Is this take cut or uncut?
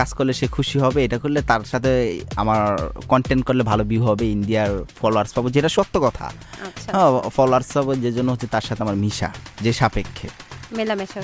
uncut